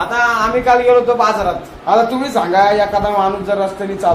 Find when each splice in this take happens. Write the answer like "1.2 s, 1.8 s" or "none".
1.7 s